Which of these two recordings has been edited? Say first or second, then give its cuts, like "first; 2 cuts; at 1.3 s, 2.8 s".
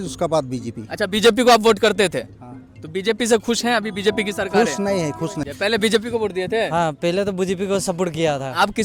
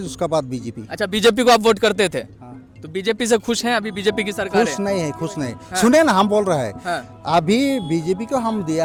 first; 1 cut; at 5.4 s